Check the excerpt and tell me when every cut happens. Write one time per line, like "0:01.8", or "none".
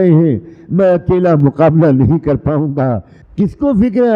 0:03.1